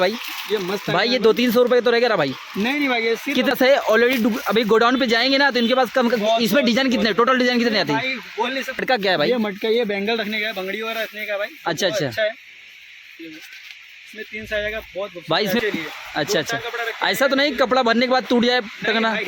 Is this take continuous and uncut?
no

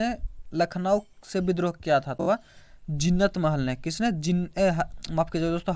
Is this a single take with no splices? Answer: yes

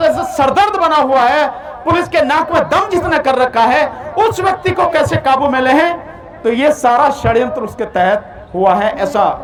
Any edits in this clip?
no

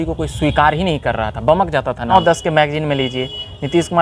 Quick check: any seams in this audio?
yes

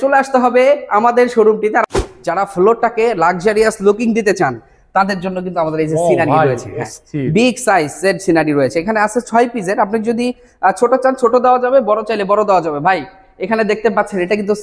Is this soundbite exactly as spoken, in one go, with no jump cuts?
no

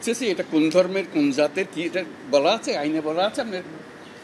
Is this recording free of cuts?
yes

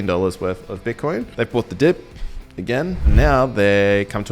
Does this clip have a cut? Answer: yes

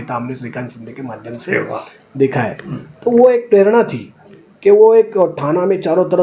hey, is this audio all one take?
yes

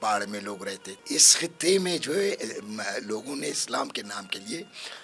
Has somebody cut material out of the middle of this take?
yes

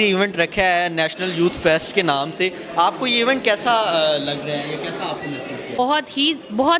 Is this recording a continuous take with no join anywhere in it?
no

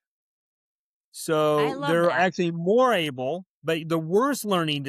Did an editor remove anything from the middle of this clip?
no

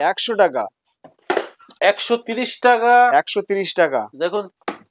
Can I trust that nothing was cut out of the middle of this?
yes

